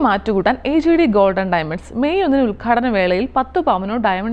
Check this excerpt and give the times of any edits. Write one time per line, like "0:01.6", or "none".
none